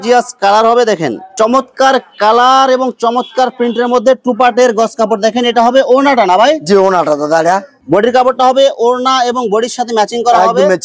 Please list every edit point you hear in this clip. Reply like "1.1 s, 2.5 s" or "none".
1.2 s, 7.7 s

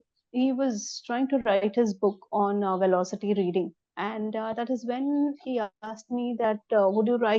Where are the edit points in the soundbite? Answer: 3.8 s

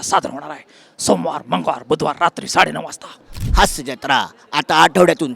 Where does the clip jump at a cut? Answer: 3.3 s

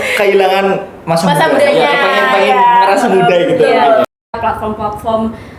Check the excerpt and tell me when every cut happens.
4.2 s

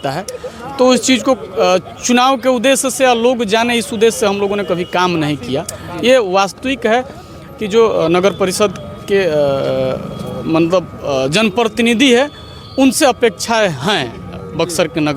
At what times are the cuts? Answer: none

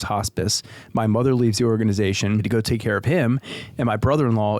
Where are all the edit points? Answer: 2.4 s

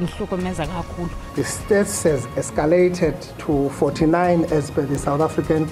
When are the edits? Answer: 1.2 s

